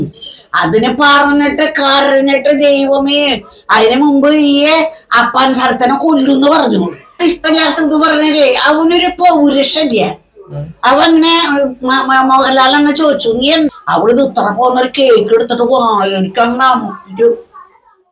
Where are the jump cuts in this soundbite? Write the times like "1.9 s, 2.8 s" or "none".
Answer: 7.2 s, 13.7 s

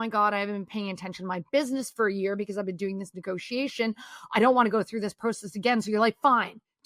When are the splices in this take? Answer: none

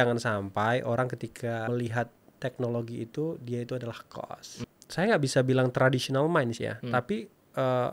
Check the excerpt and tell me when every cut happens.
1.7 s, 4.6 s

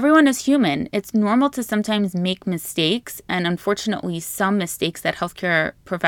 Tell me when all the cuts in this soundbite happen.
none

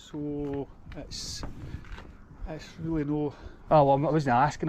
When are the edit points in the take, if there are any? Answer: none

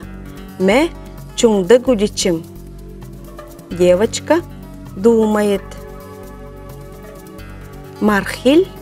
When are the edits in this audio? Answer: 6.0 s, 8.0 s

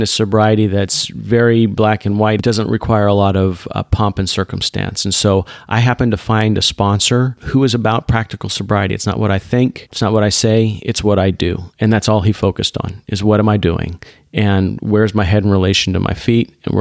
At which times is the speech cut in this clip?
2.4 s, 7.4 s, 9.9 s

